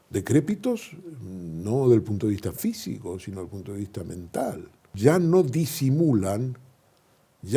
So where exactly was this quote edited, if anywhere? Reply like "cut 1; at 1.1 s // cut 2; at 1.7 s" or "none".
cut 1; at 4.9 s